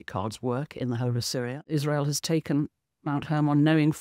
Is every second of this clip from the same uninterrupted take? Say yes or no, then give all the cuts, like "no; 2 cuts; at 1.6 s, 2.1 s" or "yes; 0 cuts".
no; 1 cut; at 1.6 s